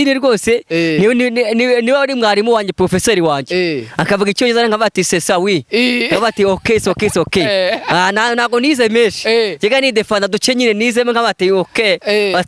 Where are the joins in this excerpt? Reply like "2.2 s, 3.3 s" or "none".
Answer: none